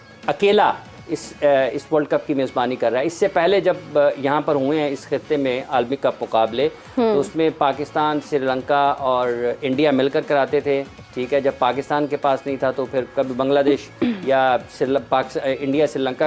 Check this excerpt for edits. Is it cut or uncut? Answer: uncut